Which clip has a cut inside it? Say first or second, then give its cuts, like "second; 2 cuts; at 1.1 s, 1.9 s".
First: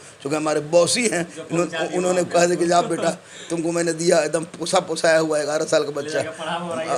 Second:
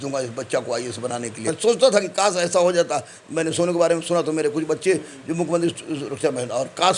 second; 1 cut; at 1.5 s